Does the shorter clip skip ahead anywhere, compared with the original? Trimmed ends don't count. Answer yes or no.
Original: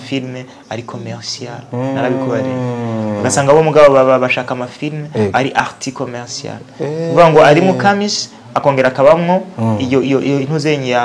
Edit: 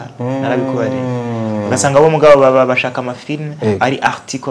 no